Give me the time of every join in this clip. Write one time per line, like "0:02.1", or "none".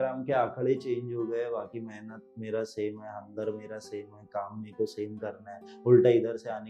none